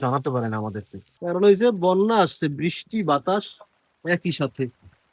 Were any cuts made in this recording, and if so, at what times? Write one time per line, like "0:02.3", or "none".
0:01.1